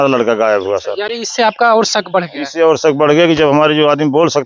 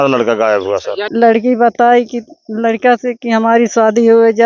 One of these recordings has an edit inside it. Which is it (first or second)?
second